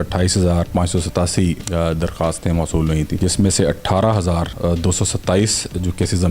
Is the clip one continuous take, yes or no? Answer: no